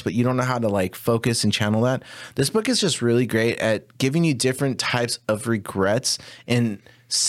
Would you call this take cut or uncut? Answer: uncut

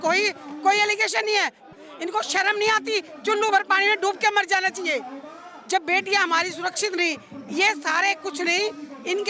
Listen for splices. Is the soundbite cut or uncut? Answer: cut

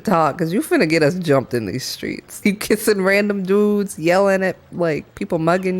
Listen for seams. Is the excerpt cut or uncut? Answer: cut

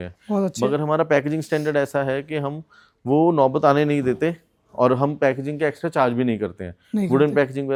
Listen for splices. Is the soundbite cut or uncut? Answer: uncut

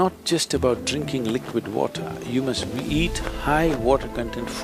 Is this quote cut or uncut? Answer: uncut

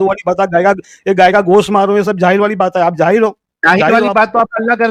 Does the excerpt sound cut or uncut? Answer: uncut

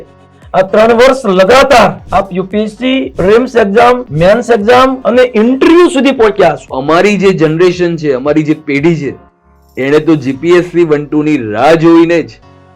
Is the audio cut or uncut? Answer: cut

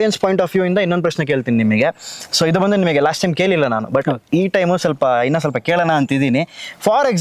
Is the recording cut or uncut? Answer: uncut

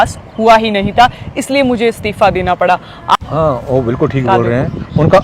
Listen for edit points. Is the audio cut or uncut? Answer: cut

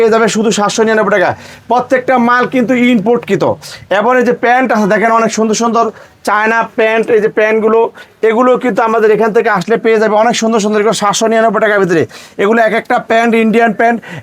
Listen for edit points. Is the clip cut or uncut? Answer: uncut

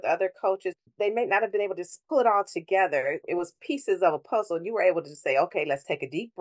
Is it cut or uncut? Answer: cut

